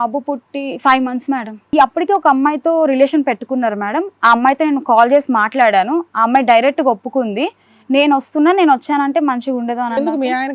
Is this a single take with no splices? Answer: no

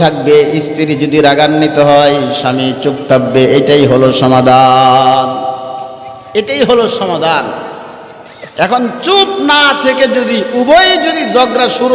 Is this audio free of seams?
yes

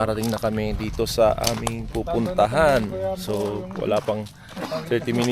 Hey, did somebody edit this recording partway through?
yes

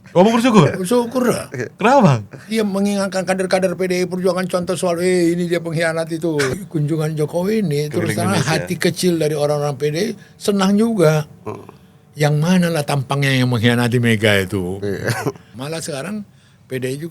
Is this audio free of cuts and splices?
no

